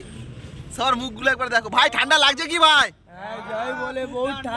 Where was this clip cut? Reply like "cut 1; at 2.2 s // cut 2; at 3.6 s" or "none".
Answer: none